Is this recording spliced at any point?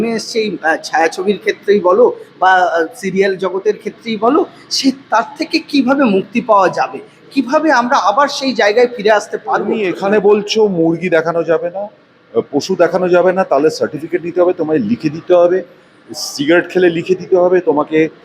yes; 1 cut; at 9.7 s

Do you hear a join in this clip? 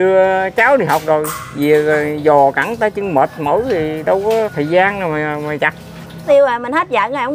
yes; 1 cut; at 5.9 s

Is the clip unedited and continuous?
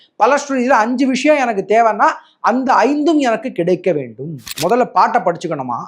no; 1 cut; at 4.5 s

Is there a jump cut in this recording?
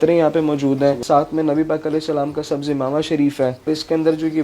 yes; 2 cuts; at 1.0 s, 3.7 s

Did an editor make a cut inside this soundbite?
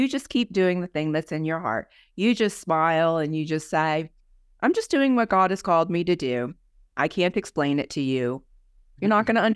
no; 0 cuts

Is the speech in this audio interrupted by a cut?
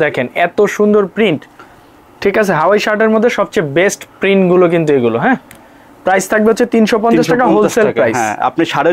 no; 0 cuts

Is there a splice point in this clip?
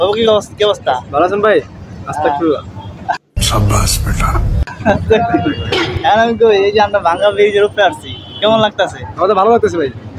no; 0 cuts

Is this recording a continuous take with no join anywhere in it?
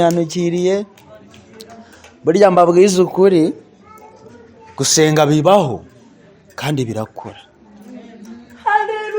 yes; 0 cuts

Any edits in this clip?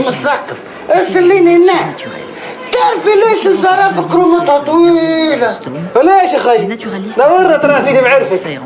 no; 0 cuts

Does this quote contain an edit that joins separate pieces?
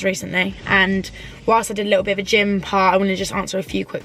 no; 0 cuts

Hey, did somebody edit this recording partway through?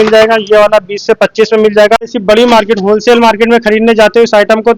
yes; 1 cut; at 2.2 s

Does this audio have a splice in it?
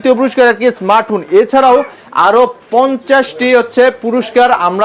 no; 0 cuts

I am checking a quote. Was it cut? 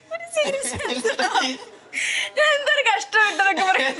no; 0 cuts

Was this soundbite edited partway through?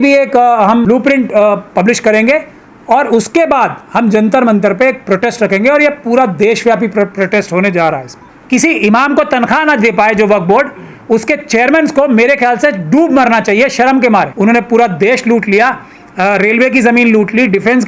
yes; 3 cuts; at 0.8 s, 8.2 s, 14.3 s

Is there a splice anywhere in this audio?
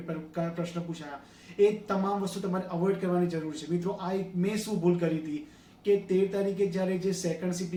no; 0 cuts

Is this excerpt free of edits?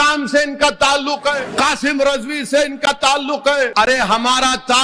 no; 2 cuts; at 1.5 s, 3.7 s

